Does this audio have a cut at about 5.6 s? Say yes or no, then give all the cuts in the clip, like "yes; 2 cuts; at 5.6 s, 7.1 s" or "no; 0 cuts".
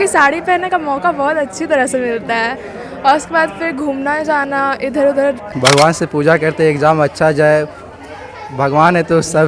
yes; 1 cut; at 5.6 s